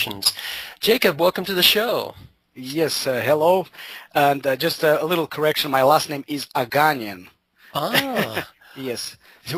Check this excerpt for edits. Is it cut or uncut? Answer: cut